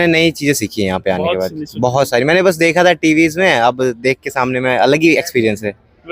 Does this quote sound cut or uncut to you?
uncut